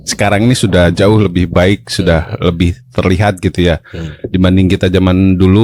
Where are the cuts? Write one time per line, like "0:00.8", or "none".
none